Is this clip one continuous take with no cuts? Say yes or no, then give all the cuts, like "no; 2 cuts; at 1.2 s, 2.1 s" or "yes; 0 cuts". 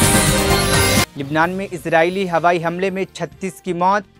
no; 1 cut; at 1.1 s